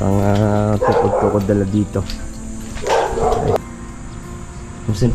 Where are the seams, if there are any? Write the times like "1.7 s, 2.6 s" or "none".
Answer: 3.6 s

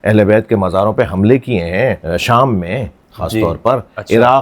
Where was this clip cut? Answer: 2.0 s

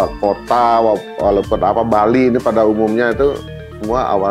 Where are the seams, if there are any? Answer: none

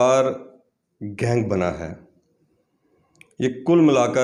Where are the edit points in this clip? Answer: none

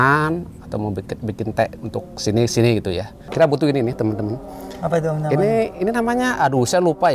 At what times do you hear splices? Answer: 3.2 s

